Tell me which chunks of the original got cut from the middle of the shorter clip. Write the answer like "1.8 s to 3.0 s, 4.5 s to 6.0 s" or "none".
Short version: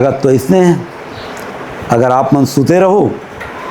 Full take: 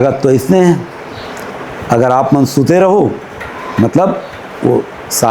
none